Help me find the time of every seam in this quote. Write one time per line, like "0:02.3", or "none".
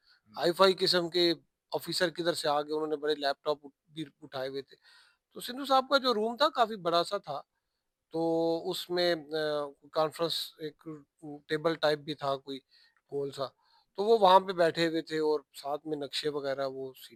none